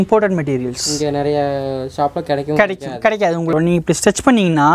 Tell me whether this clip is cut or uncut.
cut